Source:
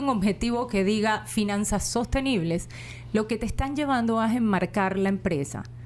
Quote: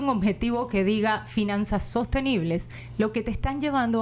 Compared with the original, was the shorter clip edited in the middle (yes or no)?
yes